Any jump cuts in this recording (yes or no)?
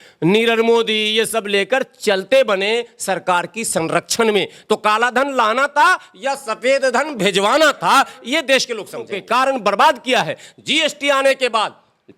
yes